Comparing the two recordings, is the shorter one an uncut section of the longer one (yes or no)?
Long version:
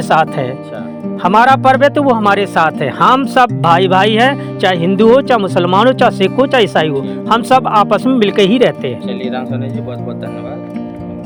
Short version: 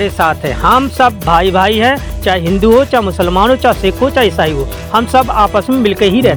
yes